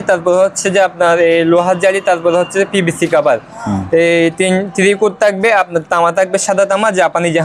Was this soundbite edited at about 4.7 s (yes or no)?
no